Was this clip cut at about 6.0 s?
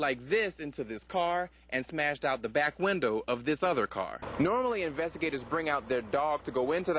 no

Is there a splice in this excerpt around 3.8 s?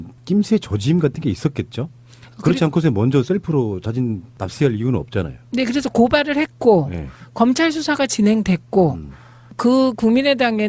no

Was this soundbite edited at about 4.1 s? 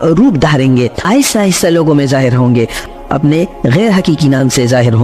no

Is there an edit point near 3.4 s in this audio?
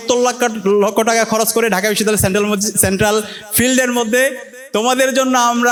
no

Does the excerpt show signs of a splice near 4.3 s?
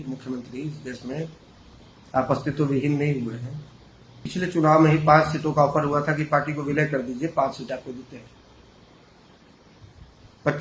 yes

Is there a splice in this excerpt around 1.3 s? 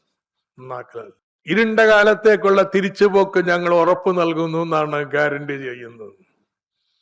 yes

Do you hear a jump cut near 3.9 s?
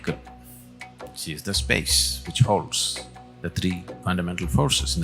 yes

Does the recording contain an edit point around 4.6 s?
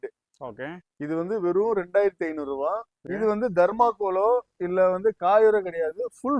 no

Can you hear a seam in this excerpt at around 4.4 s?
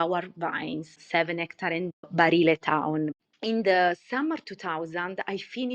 no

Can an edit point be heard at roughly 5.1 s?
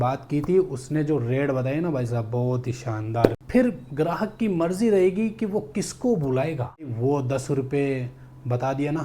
no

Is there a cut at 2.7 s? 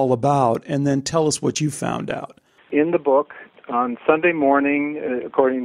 yes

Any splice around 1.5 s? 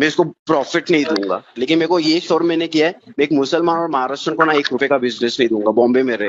yes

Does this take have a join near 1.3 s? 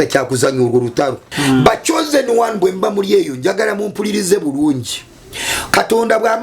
yes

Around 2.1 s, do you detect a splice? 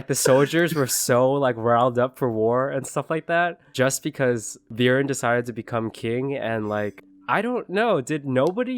no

